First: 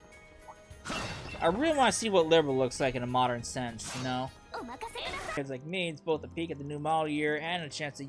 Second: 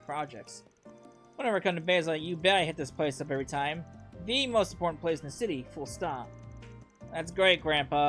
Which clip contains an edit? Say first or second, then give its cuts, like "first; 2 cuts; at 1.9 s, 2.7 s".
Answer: first; 1 cut; at 5.4 s